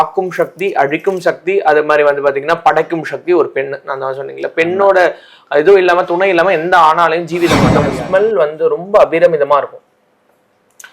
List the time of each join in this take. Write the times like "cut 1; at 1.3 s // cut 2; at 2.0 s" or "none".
cut 1; at 7.8 s